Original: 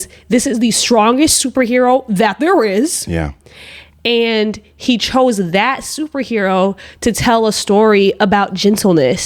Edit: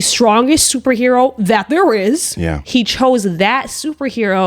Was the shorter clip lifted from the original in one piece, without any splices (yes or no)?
no